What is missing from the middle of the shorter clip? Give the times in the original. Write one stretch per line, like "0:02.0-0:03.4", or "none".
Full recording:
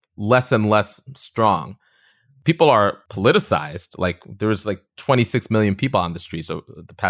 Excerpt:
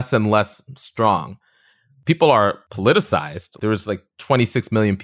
0:03.9-0:04.2